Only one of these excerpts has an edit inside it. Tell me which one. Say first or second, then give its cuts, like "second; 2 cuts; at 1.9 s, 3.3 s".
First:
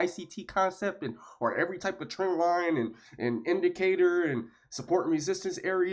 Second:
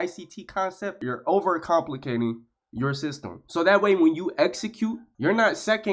second; 2 cuts; at 1.0 s, 3.4 s